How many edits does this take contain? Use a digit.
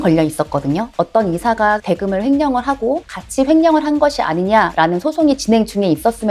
2